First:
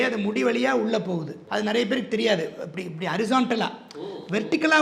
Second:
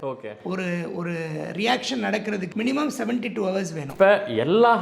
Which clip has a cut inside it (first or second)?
second